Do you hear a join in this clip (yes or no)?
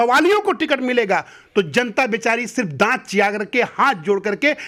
no